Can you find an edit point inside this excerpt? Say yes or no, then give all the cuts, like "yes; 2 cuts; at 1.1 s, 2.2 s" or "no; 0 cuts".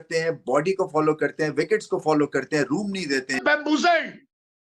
yes; 1 cut; at 3.4 s